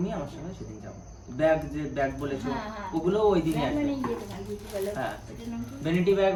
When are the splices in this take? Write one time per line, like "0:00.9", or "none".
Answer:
none